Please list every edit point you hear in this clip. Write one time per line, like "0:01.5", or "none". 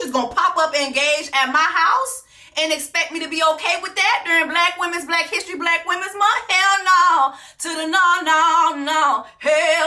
none